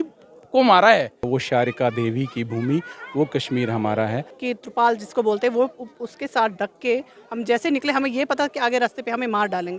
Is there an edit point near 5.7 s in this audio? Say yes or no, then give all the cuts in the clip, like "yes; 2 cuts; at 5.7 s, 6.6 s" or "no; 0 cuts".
no; 2 cuts; at 1.2 s, 4.3 s